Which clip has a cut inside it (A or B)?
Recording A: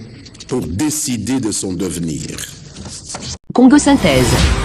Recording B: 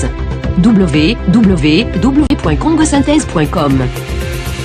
A